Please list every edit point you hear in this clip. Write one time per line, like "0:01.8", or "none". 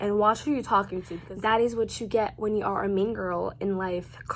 0:01.0